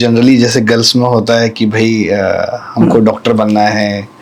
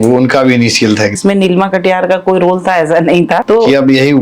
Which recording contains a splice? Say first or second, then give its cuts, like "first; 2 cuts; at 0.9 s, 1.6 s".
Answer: second; 2 cuts; at 1.2 s, 3.4 s